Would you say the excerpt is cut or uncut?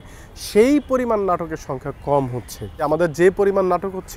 cut